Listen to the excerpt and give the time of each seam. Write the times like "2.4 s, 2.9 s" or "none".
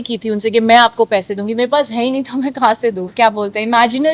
3.0 s